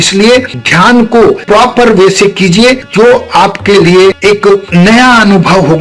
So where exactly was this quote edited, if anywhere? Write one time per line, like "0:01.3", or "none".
0:02.8
0:04.2

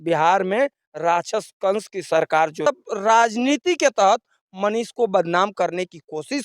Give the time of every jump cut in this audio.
0:02.6

